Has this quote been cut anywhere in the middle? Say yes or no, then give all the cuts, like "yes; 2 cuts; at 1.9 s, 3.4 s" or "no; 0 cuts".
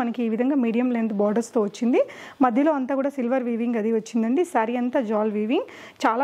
no; 0 cuts